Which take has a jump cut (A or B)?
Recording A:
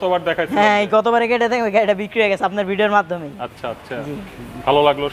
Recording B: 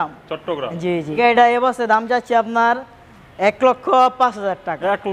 B